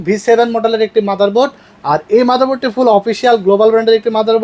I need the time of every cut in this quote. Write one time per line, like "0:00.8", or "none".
none

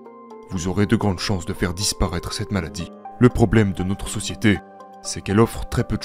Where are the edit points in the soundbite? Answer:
0:02.9

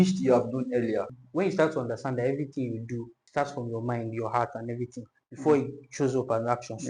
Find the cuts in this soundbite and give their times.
0:01.2
0:03.2

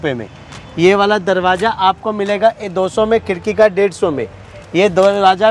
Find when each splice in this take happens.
none

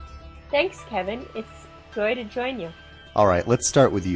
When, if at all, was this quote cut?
0:02.5

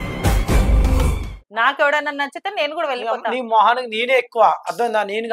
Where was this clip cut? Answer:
0:01.3

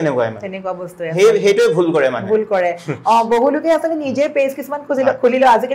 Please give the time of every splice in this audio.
none

